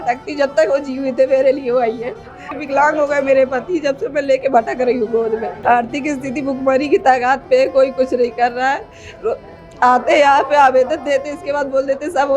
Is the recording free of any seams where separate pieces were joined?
no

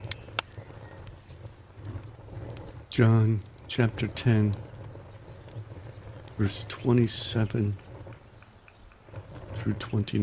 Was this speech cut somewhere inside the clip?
yes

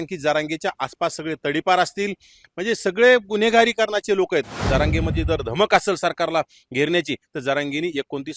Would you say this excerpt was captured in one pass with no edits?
no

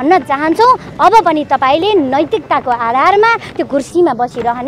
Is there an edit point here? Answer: no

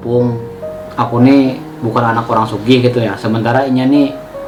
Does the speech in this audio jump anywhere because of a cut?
no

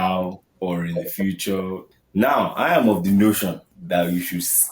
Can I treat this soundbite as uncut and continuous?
no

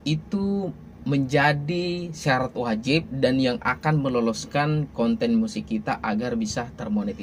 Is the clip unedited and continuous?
yes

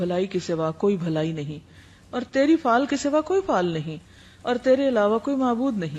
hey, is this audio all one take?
yes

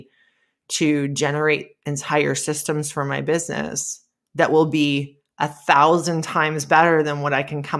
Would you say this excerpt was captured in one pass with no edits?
yes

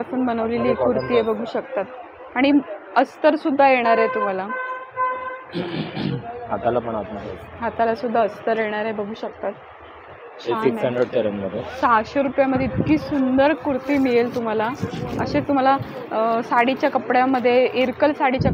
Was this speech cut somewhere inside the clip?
no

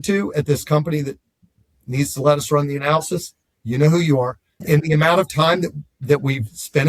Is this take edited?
yes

